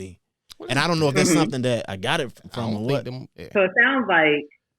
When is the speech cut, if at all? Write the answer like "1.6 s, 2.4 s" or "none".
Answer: 3.3 s